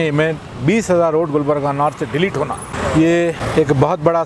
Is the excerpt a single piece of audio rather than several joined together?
no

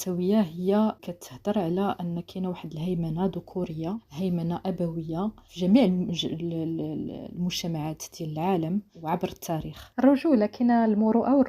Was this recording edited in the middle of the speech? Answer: yes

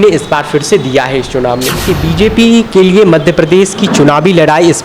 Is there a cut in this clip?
yes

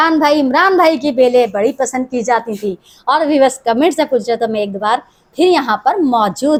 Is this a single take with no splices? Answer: yes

